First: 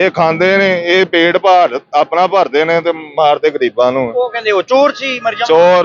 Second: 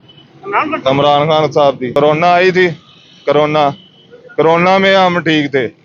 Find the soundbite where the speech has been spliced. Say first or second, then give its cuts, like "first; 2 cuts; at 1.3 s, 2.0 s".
second; 1 cut; at 2.0 s